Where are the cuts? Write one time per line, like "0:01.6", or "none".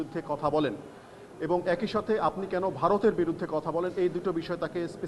none